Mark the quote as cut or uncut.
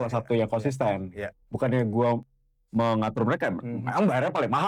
uncut